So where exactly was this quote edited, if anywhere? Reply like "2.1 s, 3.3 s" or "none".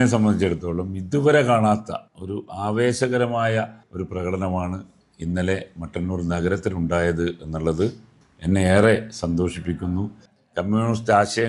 10.2 s